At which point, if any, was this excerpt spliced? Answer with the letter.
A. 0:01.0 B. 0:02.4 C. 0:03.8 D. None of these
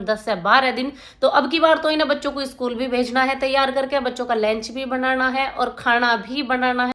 D